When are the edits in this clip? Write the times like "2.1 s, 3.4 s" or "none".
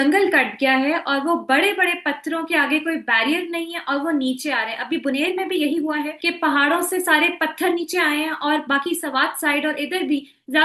6.2 s